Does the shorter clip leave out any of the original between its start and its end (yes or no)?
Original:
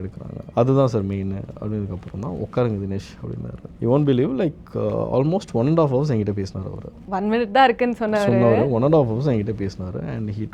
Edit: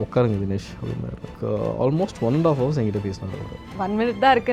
yes